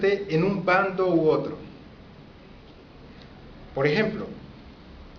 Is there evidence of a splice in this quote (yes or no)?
yes